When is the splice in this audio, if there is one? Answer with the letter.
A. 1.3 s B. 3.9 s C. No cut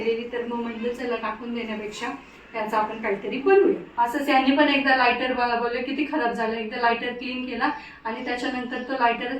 B